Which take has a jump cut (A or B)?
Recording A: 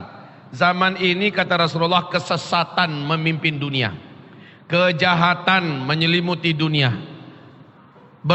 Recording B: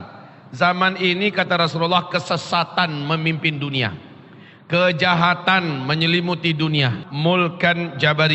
B